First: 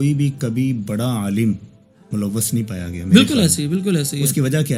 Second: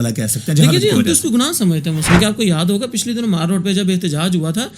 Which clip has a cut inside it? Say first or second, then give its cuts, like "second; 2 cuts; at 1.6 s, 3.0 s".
second; 1 cut; at 2.0 s